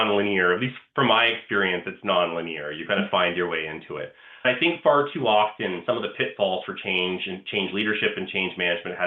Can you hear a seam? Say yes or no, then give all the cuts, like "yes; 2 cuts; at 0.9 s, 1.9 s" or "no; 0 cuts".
yes; 1 cut; at 4.4 s